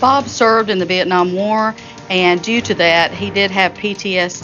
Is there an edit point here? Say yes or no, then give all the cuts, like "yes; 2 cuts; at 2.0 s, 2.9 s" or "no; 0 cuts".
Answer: no; 0 cuts